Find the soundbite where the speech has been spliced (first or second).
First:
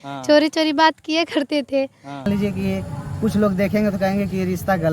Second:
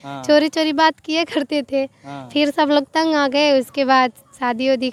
first